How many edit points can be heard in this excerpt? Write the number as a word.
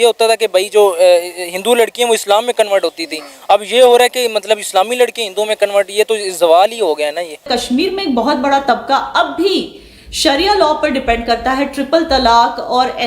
one